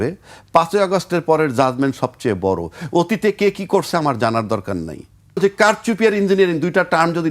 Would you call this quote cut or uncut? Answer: cut